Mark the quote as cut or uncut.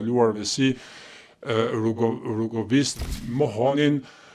cut